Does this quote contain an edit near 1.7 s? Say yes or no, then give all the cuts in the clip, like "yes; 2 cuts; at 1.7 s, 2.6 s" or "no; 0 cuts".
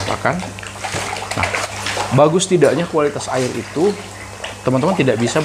yes; 1 cut; at 1.7 s